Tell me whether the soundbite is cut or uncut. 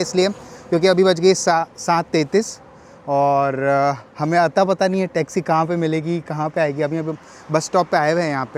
uncut